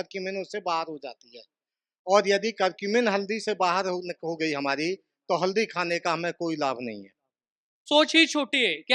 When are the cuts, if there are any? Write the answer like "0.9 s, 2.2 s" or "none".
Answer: 7.8 s